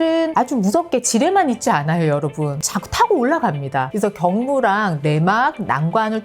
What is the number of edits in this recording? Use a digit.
0